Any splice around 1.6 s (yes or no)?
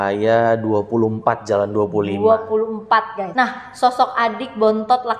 no